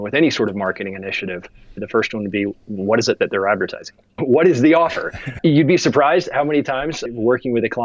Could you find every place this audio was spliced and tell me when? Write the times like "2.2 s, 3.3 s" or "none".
1.8 s, 4.2 s, 5.2 s, 7.0 s